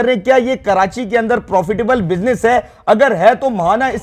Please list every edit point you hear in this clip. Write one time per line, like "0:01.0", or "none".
none